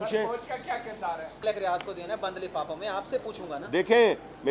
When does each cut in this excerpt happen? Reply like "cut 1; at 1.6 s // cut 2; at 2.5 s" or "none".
cut 1; at 1.3 s